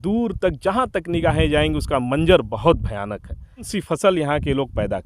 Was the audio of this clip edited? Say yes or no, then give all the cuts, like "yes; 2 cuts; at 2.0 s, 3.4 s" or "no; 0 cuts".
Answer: yes; 1 cut; at 3.7 s